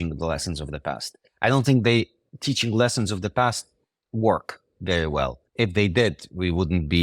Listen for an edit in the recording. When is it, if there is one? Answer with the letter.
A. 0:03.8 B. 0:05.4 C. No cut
B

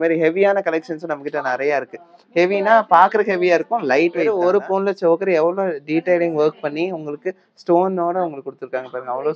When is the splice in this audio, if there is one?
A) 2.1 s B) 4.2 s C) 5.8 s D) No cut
B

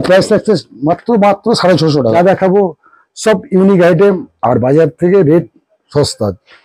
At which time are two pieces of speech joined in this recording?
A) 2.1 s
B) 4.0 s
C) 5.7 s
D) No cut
A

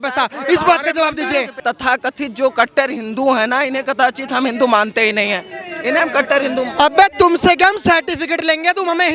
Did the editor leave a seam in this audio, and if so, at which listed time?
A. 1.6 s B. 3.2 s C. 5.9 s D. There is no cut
A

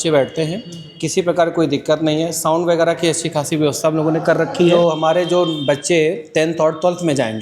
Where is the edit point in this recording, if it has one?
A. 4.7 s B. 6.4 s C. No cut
A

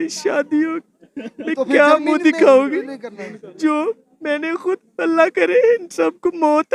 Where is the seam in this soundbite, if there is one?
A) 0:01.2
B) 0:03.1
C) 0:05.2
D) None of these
D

